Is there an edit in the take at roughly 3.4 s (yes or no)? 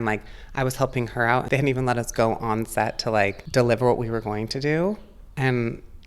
yes